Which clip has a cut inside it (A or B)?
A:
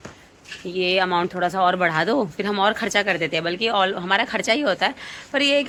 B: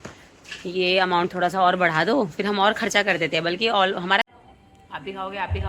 B